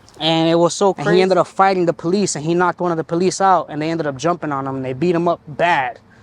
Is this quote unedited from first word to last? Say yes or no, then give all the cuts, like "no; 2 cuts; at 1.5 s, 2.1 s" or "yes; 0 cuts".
no; 1 cut; at 1.0 s